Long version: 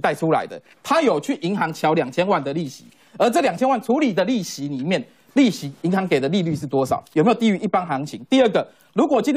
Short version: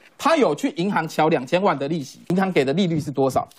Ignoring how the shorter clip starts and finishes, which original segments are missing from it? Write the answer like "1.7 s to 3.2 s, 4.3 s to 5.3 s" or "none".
2.8 s to 5.7 s